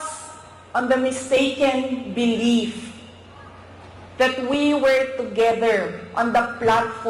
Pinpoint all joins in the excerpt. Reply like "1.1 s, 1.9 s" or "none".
none